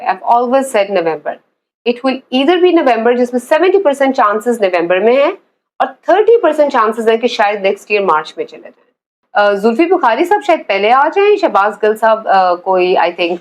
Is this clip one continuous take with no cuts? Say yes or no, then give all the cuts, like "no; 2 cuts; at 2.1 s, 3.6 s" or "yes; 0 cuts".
no; 1 cut; at 9.2 s